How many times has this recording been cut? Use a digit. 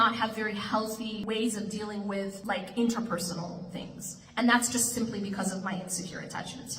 2